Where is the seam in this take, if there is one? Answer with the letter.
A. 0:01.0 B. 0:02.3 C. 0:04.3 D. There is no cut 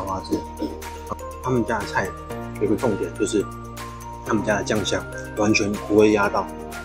A